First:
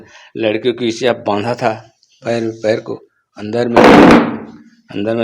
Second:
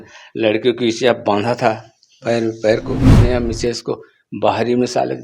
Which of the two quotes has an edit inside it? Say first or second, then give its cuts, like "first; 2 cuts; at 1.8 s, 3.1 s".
second; 1 cut; at 3.1 s